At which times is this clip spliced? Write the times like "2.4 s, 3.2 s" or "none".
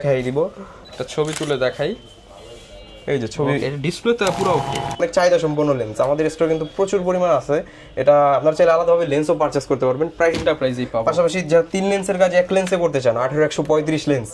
5.0 s, 10.4 s